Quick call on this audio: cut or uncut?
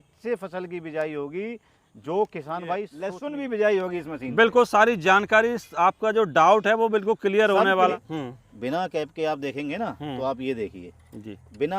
cut